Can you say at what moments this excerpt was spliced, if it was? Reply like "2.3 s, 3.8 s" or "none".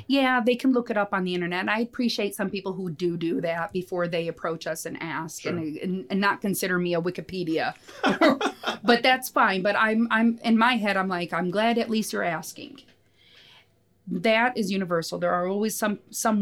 none